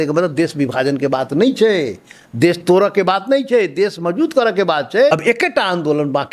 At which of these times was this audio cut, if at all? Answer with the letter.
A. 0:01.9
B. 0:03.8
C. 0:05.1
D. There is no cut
C